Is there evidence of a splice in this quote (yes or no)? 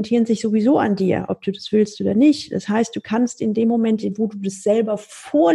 no